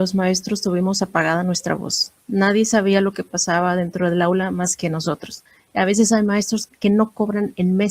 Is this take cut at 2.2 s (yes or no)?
no